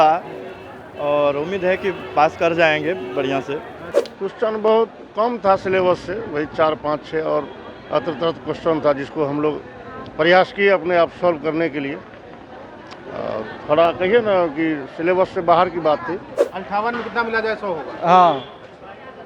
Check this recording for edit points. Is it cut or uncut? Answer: cut